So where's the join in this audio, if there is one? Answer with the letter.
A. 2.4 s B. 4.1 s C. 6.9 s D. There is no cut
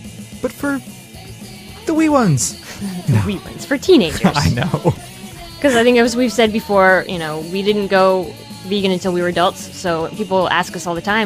A